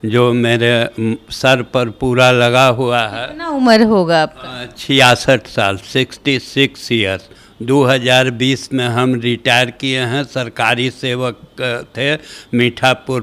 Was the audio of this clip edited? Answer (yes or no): no